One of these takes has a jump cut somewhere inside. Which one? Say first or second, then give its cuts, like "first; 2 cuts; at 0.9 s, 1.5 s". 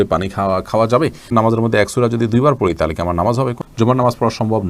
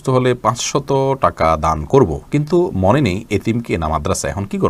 first; 2 cuts; at 1.3 s, 3.6 s